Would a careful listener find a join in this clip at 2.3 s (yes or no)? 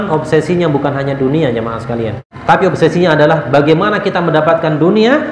yes